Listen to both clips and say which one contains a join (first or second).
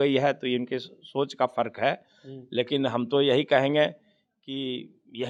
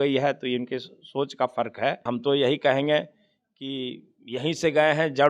second